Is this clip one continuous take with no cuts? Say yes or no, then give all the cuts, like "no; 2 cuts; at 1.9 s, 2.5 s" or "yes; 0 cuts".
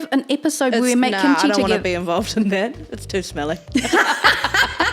yes; 0 cuts